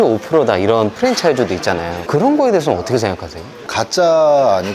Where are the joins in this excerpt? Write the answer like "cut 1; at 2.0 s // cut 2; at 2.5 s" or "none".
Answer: none